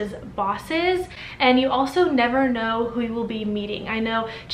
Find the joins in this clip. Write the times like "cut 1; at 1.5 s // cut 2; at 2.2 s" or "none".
none